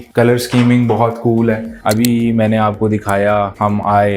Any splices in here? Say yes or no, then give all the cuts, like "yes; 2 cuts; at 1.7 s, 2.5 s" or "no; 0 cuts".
yes; 1 cut; at 1.7 s